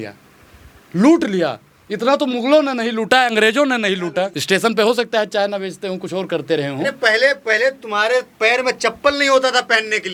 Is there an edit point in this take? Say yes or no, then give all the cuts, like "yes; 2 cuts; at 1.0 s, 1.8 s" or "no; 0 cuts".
no; 0 cuts